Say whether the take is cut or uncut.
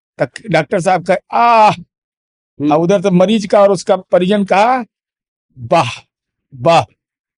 uncut